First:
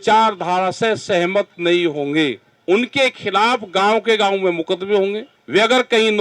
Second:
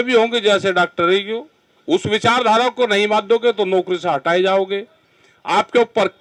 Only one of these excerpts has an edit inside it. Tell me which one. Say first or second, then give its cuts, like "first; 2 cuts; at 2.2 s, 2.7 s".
first; 2 cuts; at 2.5 s, 5.3 s